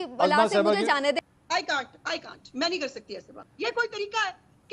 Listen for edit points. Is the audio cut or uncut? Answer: cut